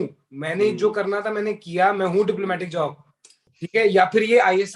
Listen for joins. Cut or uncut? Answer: cut